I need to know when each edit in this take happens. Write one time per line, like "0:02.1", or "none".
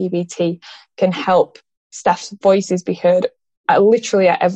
none